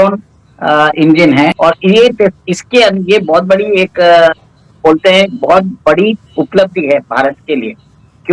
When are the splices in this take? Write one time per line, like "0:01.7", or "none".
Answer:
0:01.5